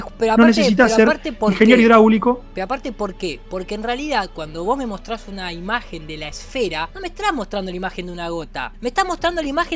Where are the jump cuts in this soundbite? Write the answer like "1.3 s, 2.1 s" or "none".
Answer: 6.9 s, 8.7 s